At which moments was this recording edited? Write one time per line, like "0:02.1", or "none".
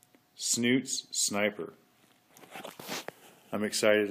0:01.8